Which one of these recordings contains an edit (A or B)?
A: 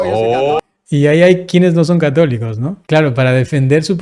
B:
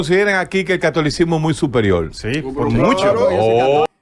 A